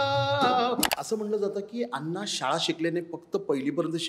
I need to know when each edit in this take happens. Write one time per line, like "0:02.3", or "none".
0:00.9